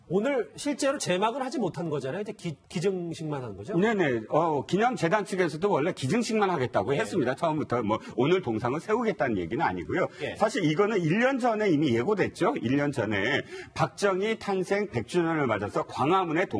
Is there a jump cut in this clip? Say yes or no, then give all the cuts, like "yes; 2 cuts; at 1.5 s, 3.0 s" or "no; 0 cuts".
yes; 1 cut; at 5.8 s